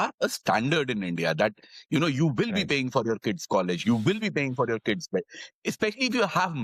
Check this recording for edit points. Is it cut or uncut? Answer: uncut